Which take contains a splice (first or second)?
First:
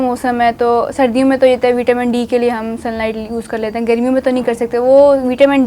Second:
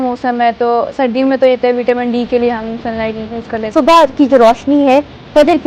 second